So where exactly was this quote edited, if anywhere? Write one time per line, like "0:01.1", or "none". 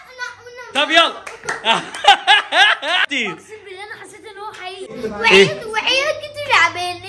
0:03.1
0:04.9